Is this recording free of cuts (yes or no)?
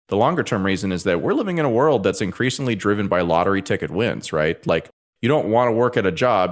yes